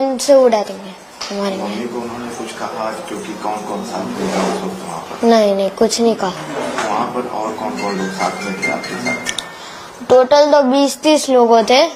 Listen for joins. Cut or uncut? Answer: uncut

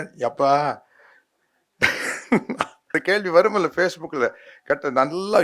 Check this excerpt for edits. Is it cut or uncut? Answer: cut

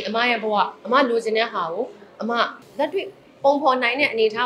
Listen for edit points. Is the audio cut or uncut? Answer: cut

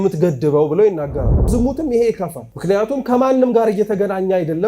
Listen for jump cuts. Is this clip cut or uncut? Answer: cut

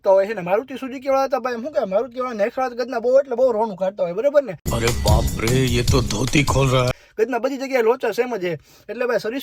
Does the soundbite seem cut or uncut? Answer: uncut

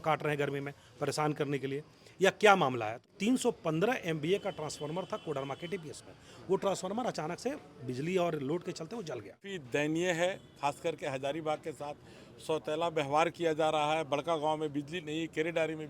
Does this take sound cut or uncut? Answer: cut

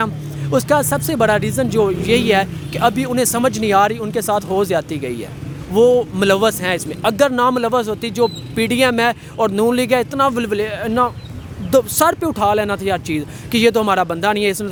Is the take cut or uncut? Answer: uncut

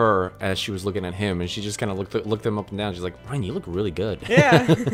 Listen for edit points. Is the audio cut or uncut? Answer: uncut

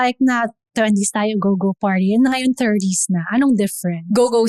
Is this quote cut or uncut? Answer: uncut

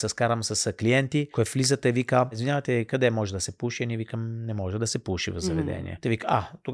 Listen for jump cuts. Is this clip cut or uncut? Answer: cut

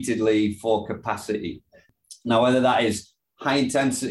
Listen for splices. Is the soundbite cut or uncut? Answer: cut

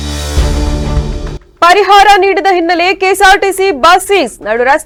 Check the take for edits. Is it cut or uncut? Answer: uncut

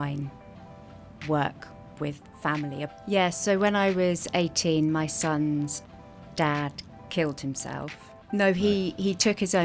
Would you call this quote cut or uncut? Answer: cut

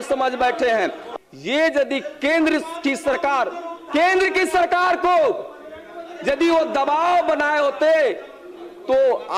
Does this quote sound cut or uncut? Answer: cut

